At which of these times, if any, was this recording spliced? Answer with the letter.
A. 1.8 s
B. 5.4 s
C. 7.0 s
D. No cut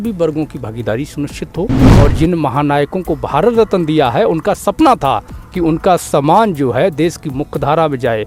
A